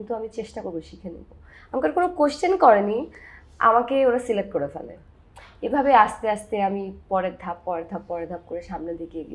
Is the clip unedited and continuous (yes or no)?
yes